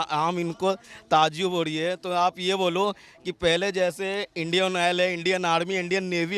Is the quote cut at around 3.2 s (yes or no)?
no